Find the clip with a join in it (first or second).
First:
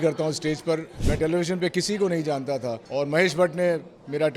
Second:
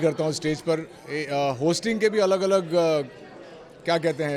first